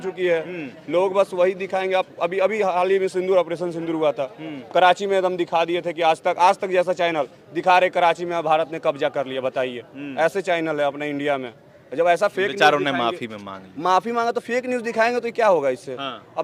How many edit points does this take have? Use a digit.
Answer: 0